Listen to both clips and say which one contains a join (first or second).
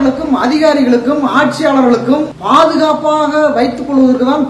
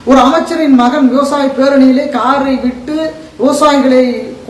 first